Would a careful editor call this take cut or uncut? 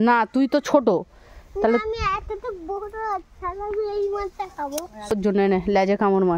cut